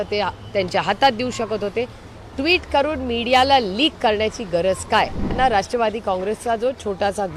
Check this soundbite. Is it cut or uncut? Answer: cut